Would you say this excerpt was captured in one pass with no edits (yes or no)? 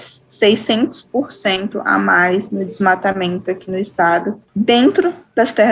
no